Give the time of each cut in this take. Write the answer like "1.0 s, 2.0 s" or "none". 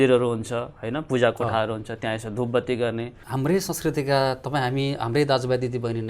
3.2 s